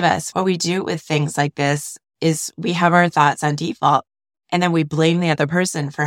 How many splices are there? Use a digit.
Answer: 0